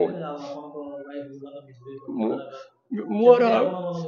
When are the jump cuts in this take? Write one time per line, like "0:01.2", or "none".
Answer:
none